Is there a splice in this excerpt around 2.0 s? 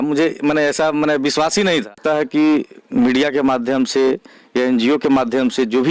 yes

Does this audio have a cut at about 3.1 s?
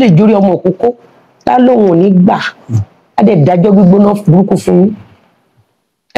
no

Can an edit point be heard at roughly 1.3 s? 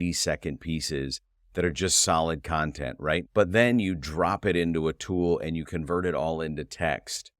no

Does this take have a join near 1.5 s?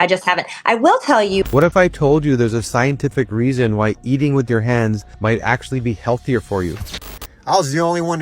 yes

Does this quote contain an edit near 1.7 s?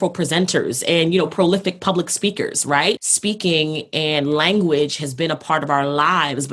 no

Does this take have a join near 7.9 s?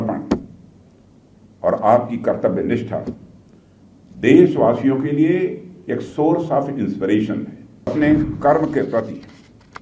yes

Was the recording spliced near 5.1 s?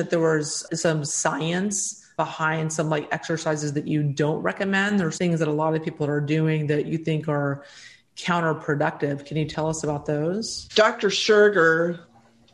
yes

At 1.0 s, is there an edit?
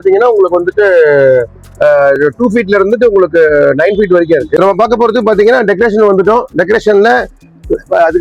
no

